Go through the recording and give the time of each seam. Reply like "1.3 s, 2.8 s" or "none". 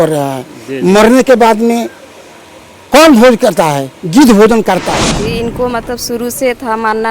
5.2 s